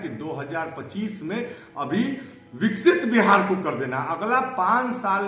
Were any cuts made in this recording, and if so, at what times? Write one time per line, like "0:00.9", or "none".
none